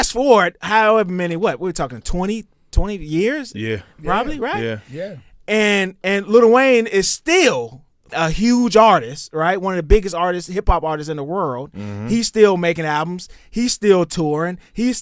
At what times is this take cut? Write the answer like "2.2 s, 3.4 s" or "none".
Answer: 8.0 s